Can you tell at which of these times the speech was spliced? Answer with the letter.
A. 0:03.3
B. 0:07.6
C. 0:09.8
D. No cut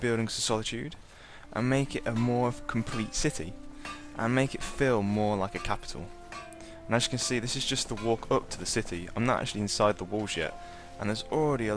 A